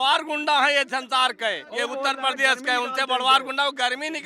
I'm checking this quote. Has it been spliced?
no; 0 cuts

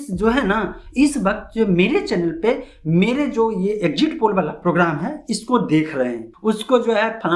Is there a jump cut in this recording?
yes; 1 cut; at 6.3 s

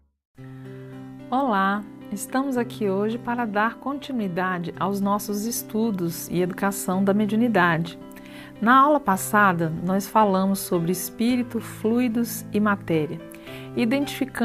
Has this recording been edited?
yes; 1 cut; at 7.1 s

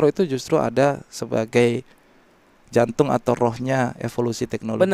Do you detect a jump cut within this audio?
no; 0 cuts

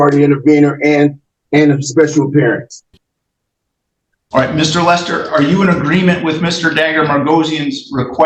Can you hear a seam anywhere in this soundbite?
no; 0 cuts

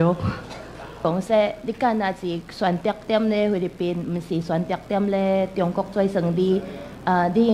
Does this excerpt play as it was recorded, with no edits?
no; 1 cut; at 1.0 s

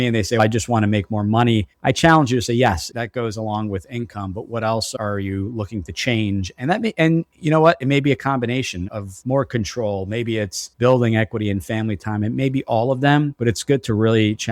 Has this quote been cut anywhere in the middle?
no; 0 cuts

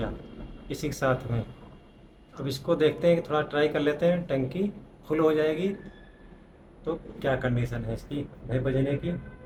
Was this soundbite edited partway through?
no; 0 cuts

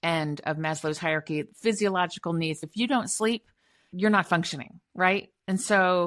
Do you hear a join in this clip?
yes; 2 cuts; at 2.6 s, 3.9 s

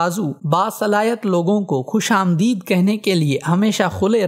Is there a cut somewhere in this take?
no; 0 cuts

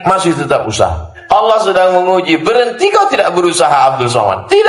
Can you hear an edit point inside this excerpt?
yes; 1 cut; at 1.1 s

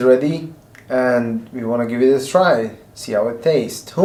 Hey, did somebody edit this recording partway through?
no; 0 cuts

